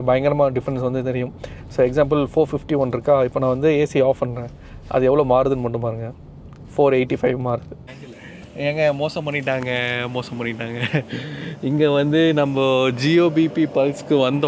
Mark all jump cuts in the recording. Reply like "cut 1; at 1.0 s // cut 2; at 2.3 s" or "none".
cut 1; at 7.8 s